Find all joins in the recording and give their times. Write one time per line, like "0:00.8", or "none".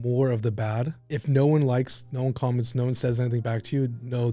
0:01.0